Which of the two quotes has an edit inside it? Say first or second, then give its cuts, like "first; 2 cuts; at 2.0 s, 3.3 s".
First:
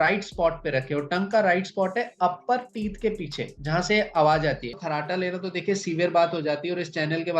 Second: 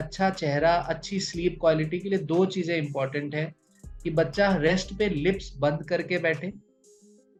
first; 1 cut; at 4.8 s